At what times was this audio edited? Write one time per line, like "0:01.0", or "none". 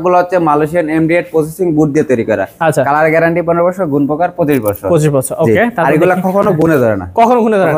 none